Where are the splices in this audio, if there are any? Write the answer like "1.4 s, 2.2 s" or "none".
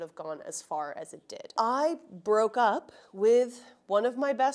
1.5 s